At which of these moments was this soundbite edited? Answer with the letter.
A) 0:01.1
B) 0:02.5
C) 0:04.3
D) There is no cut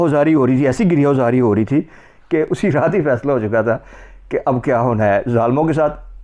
B